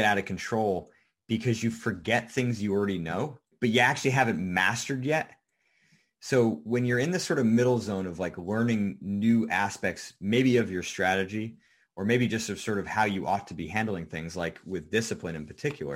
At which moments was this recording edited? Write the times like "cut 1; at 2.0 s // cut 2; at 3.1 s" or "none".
cut 1; at 3.5 s